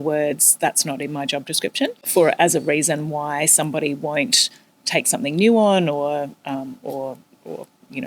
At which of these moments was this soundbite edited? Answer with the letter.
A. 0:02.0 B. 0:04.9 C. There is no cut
A